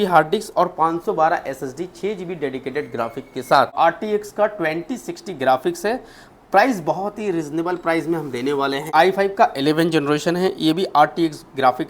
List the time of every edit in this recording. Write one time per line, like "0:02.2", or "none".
0:03.7
0:08.9